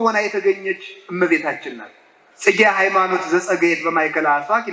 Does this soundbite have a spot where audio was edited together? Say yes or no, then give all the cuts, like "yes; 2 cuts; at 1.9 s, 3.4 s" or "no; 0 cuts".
no; 0 cuts